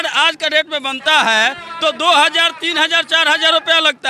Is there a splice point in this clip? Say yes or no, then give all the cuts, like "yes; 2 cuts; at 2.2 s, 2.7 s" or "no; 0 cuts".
no; 0 cuts